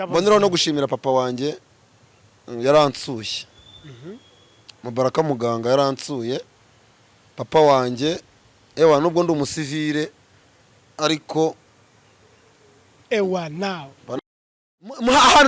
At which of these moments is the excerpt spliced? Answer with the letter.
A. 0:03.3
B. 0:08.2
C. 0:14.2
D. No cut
C